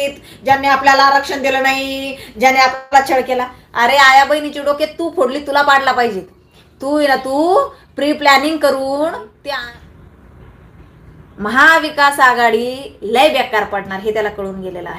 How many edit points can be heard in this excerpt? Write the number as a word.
one